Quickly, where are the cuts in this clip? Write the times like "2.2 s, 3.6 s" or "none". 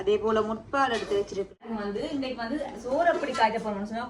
1.7 s